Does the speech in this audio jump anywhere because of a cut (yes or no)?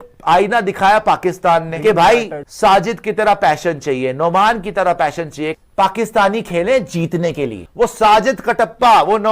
yes